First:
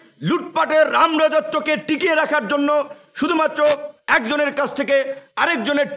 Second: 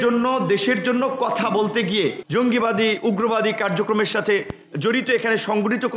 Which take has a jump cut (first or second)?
second